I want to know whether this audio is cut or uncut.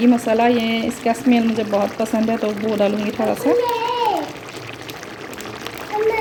uncut